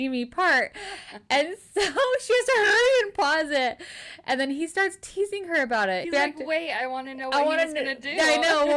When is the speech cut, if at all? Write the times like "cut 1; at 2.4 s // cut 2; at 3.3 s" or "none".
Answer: cut 1; at 6.0 s